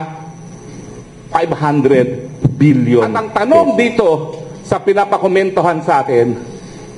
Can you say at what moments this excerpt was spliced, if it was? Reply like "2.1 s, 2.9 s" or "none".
3.2 s